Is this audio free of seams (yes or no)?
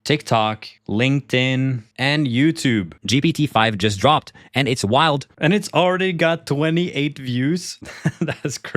no